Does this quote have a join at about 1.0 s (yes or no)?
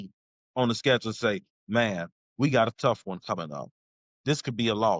no